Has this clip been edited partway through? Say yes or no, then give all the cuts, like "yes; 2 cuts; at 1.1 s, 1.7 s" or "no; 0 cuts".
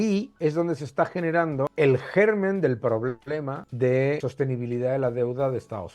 yes; 3 cuts; at 1.7 s, 3.6 s, 4.3 s